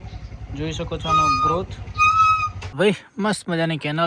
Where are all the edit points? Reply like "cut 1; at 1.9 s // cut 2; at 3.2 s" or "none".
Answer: cut 1; at 2.7 s